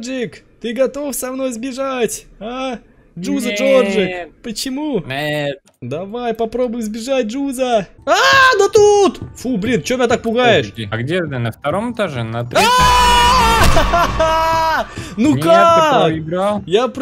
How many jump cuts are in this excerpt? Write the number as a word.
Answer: three